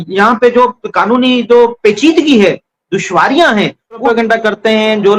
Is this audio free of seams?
no; 1 cut; at 4.0 s

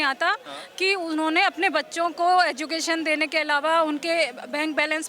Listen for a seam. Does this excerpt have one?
no; 0 cuts

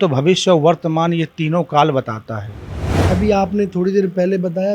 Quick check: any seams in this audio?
yes; 1 cut; at 3.1 s

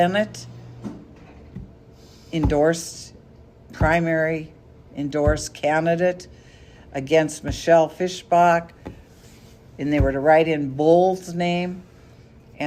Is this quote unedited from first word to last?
yes; 0 cuts

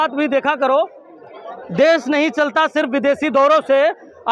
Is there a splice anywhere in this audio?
no; 0 cuts

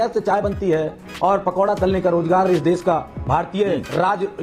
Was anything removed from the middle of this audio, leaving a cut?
no; 0 cuts

